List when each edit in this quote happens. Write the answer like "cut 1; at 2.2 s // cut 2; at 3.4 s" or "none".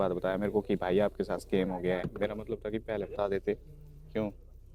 none